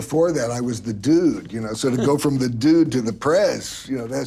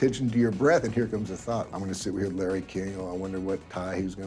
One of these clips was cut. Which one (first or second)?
second